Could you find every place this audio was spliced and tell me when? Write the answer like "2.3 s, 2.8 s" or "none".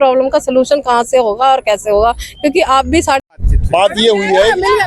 3.2 s